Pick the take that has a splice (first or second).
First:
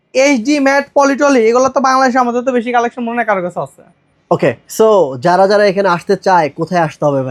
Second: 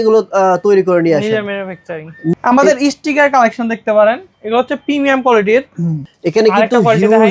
second